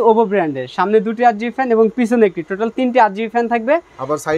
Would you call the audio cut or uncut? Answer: uncut